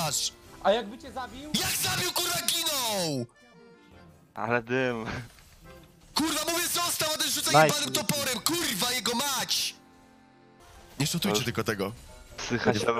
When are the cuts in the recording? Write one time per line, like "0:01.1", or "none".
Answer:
0:10.6

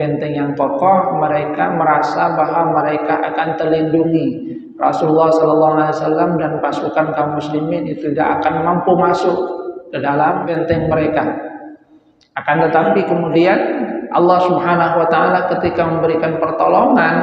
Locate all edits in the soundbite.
0:10.5

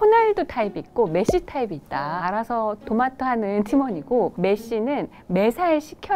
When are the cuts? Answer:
none

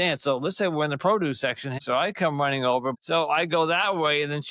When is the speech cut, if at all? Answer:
0:01.8
0:03.0

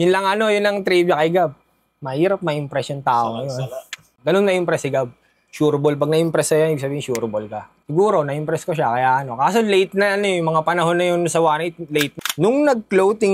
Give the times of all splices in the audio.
0:07.7
0:12.2

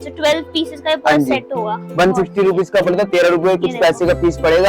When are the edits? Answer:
none

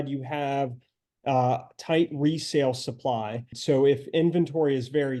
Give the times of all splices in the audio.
0:03.5

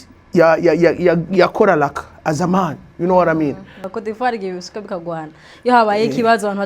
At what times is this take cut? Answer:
0:03.8

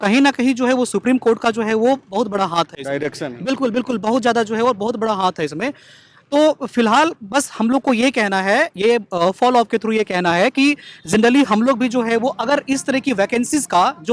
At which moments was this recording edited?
none

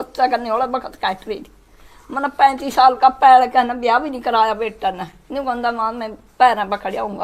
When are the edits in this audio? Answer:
none

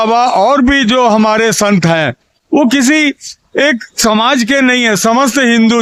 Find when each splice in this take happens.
none

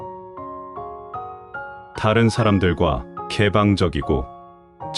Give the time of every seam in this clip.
none

